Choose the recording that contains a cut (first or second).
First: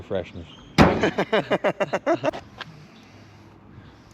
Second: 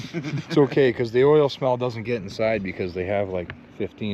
first